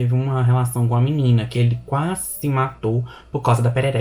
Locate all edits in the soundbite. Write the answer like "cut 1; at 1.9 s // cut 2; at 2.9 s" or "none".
none